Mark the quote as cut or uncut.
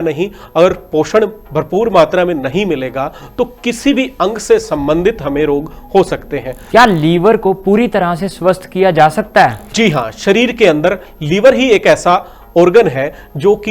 cut